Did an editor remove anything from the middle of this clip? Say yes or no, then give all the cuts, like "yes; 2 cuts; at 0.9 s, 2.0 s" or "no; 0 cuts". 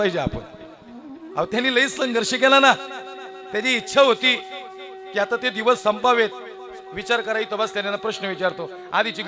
no; 0 cuts